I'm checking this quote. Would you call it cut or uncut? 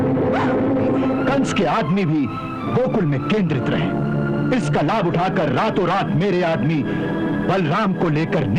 cut